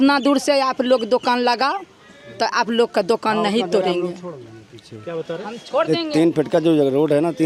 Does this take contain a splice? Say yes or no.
no